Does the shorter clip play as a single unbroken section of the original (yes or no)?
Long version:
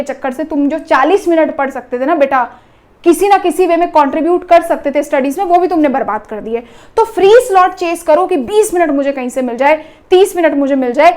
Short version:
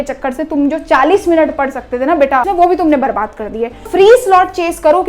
no